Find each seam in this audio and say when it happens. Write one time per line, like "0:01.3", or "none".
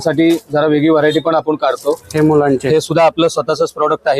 none